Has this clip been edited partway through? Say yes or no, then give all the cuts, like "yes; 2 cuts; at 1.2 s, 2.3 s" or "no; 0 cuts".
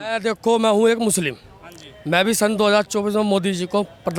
no; 0 cuts